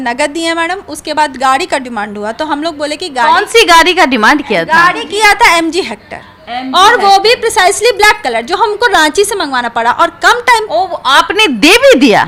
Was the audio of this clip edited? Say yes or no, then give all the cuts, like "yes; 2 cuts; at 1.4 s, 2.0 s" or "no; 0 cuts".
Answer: no; 0 cuts